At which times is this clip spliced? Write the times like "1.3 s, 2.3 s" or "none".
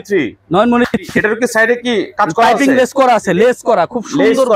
none